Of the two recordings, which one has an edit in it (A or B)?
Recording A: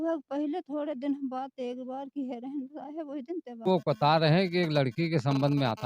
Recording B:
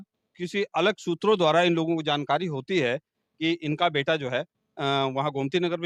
A